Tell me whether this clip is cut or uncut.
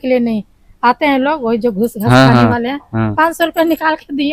uncut